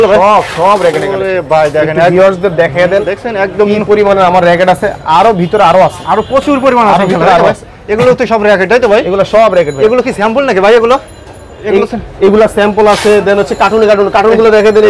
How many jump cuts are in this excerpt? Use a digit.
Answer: 0